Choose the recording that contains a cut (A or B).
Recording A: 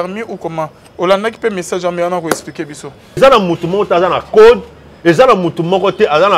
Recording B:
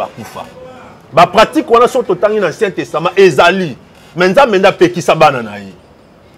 A